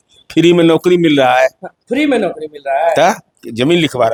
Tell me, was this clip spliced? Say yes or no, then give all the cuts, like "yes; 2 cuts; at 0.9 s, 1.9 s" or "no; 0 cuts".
no; 0 cuts